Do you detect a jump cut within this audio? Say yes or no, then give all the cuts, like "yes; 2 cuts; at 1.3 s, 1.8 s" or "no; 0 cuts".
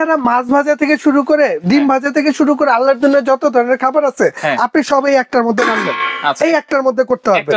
no; 0 cuts